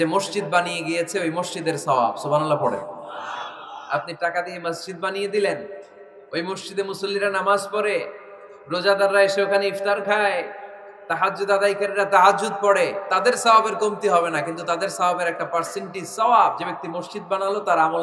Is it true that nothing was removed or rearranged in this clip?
yes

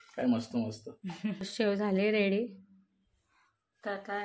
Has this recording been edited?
yes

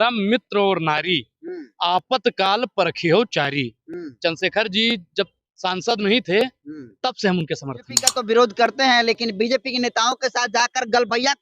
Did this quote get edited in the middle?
yes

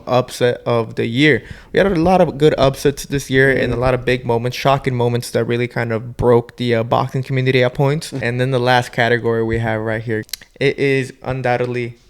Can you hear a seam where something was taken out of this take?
yes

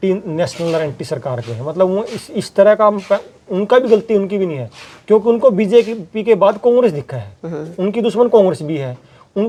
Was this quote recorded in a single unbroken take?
yes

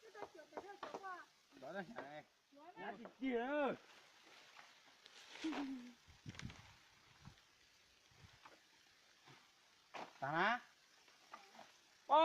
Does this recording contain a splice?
yes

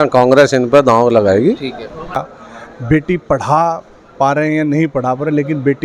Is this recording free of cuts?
no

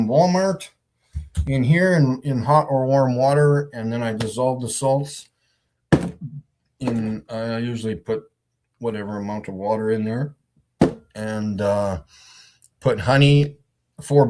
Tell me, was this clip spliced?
yes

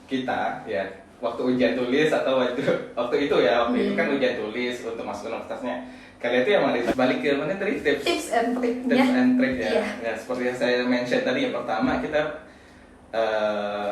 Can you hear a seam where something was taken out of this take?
yes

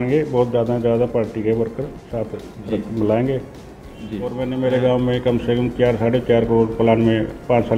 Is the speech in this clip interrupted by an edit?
yes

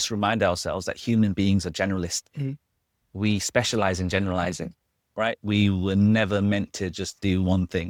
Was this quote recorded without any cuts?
yes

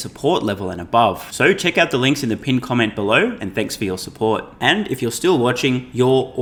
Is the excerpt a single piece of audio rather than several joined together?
yes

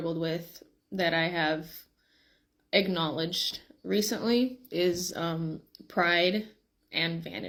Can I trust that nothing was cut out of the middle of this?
yes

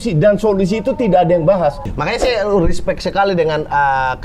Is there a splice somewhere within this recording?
yes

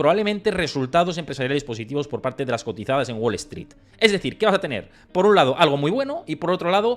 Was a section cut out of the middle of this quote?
no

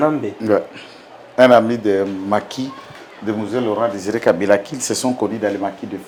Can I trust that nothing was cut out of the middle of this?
yes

